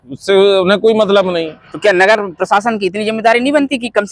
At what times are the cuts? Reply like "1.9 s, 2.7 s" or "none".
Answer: none